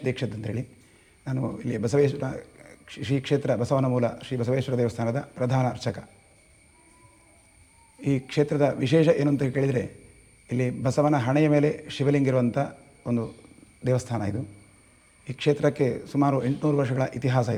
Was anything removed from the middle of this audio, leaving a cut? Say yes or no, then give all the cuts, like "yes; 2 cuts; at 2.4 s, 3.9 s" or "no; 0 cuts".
no; 0 cuts